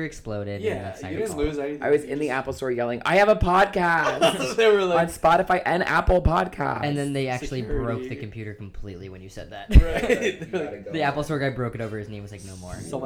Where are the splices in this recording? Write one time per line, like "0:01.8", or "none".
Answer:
none